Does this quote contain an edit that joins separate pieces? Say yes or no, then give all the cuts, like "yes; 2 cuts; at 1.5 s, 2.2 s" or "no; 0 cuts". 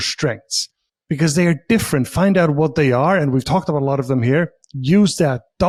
no; 0 cuts